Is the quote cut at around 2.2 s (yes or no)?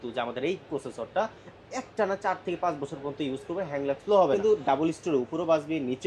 no